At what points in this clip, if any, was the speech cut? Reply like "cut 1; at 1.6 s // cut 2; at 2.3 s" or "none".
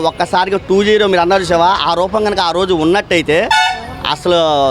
none